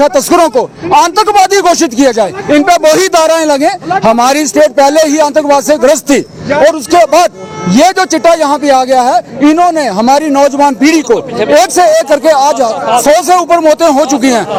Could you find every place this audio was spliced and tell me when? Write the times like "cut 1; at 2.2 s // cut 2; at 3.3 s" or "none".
none